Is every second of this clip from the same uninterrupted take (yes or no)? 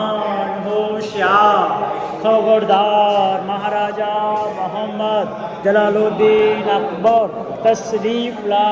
yes